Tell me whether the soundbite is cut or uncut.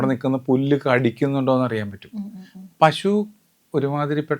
uncut